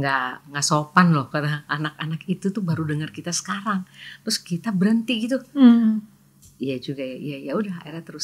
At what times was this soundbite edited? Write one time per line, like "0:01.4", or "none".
none